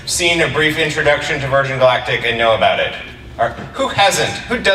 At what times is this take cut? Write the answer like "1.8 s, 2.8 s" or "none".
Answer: none